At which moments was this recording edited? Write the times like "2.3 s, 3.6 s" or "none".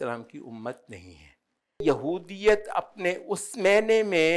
1.8 s